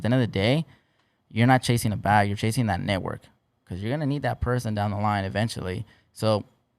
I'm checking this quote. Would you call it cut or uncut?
uncut